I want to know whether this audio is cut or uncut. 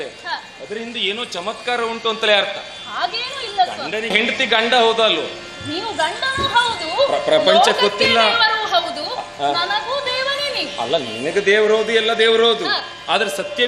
cut